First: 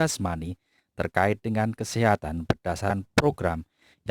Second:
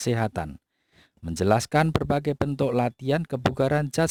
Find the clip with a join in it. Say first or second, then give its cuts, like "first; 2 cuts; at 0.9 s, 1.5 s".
first; 1 cut; at 2.9 s